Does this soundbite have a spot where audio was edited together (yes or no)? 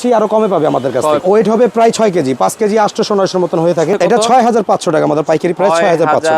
yes